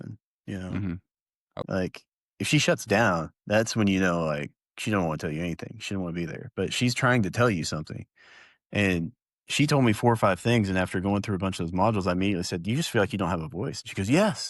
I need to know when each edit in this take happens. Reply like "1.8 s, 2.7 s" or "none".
1.5 s